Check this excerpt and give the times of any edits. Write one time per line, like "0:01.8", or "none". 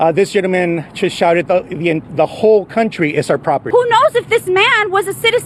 none